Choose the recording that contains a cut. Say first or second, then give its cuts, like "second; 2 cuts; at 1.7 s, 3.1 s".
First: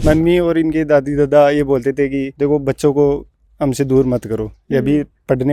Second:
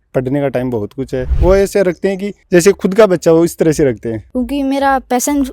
second; 2 cuts; at 1.3 s, 4.2 s